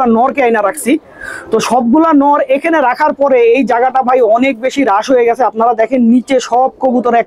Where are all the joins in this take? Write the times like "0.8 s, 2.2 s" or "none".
none